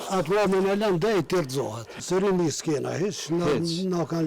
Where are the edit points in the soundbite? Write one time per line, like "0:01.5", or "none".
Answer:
0:02.0